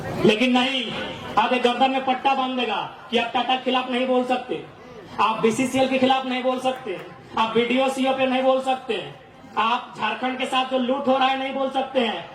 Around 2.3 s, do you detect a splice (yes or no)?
no